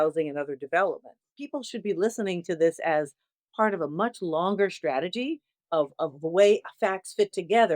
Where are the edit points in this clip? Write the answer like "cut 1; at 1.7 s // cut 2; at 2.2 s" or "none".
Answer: cut 1; at 1.4 s // cut 2; at 5.7 s